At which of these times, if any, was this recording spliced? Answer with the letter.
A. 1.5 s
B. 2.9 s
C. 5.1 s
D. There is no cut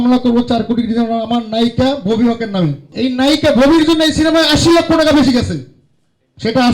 B